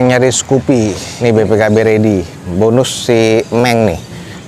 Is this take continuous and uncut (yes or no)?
no